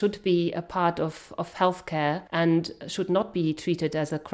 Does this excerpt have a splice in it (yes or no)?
yes